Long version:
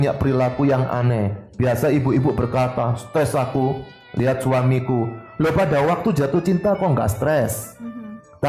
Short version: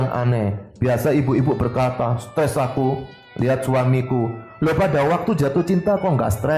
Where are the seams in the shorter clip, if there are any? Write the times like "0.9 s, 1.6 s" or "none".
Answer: none